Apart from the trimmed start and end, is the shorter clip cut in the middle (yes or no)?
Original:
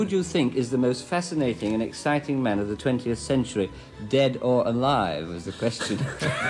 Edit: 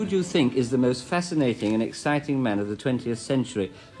no